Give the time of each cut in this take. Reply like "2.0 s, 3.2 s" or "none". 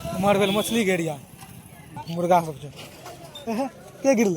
2.0 s